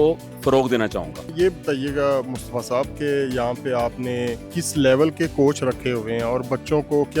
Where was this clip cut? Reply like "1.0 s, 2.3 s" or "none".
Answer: 1.3 s, 4.5 s